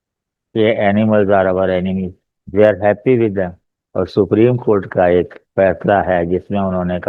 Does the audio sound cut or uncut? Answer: cut